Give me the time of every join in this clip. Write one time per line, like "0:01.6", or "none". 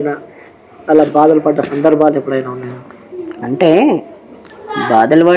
none